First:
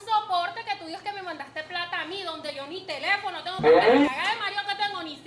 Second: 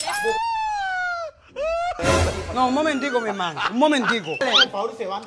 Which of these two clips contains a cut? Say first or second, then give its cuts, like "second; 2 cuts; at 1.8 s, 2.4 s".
second; 2 cuts; at 2.0 s, 4.4 s